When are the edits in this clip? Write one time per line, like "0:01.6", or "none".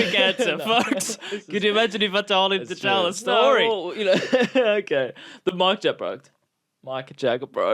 none